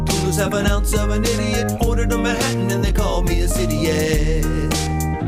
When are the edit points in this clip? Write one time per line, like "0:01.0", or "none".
none